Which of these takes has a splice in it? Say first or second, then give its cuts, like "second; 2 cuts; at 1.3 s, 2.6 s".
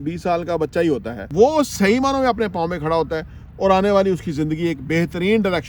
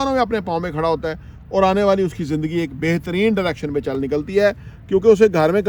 first; 1 cut; at 1.2 s